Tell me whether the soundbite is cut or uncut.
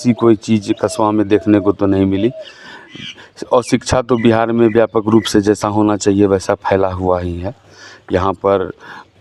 uncut